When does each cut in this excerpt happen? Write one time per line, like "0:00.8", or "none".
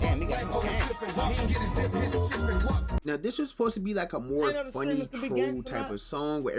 none